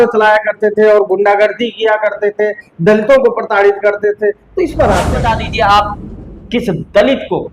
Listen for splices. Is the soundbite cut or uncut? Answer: cut